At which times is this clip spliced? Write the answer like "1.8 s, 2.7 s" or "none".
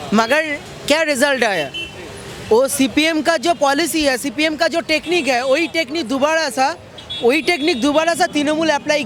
none